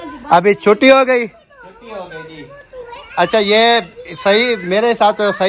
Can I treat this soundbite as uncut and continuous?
yes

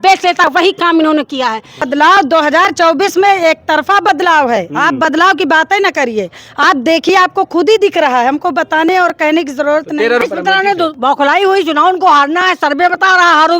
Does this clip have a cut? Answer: yes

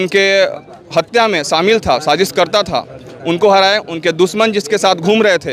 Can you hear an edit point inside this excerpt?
no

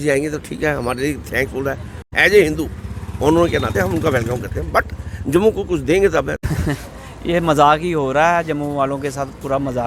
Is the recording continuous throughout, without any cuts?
no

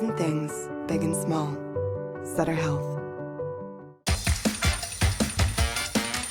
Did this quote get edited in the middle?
no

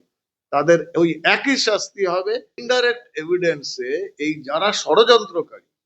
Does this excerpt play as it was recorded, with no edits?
no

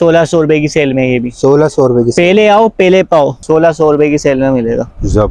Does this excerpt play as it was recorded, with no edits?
no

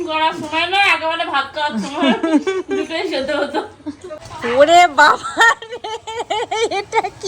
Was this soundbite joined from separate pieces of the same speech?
yes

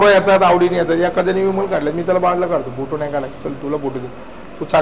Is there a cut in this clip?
no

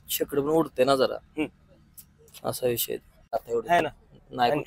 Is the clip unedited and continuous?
no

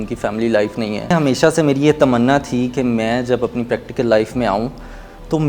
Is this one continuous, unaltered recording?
no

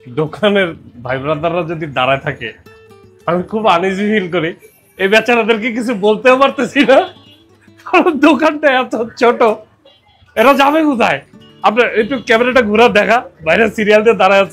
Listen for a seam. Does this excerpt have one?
no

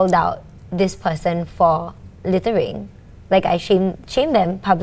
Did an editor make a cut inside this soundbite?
no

